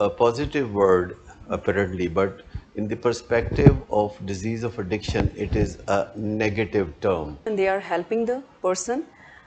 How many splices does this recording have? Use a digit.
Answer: 1